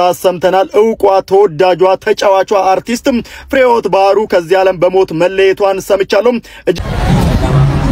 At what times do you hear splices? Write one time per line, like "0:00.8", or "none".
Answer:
0:06.8